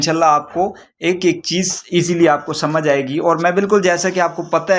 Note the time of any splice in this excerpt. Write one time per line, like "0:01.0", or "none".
none